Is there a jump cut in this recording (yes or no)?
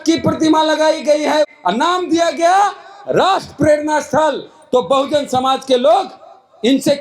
yes